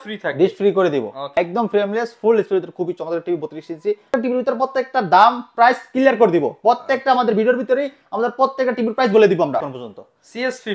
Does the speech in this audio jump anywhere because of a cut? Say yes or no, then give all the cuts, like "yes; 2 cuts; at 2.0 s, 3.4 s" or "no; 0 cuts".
yes; 3 cuts; at 1.4 s, 4.1 s, 9.6 s